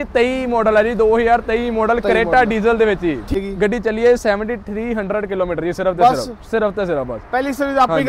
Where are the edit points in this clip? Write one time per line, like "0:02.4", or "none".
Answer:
0:03.4